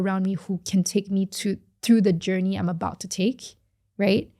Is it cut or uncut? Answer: uncut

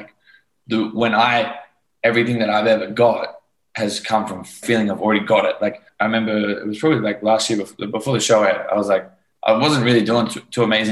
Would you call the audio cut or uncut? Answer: cut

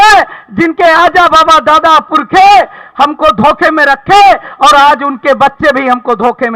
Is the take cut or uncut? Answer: uncut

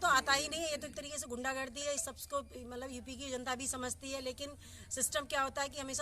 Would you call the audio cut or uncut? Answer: uncut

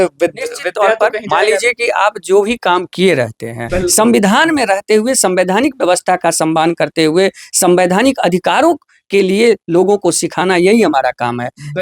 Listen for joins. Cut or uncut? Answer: cut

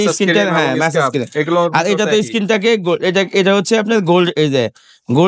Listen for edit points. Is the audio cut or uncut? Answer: uncut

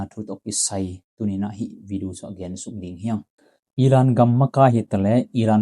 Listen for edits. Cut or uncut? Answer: cut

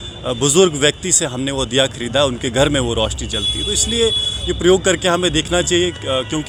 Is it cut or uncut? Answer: uncut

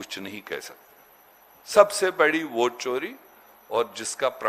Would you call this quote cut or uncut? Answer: uncut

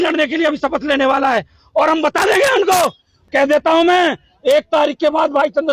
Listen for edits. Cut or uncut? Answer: cut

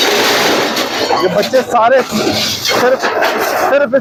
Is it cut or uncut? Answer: uncut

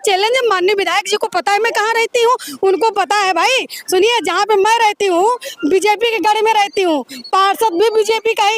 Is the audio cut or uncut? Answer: uncut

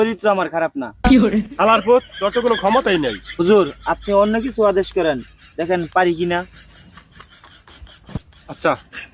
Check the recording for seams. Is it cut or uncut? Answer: uncut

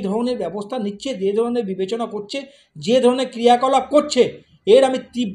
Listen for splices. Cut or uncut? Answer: uncut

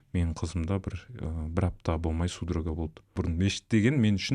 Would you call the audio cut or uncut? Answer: cut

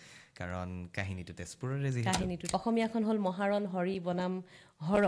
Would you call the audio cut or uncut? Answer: cut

